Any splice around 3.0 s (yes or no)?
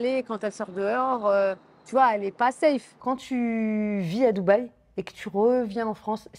yes